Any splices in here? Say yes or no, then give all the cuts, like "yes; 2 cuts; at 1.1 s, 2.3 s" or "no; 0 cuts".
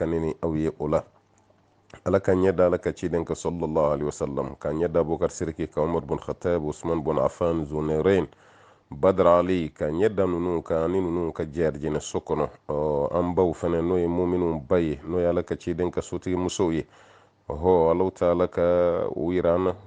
no; 0 cuts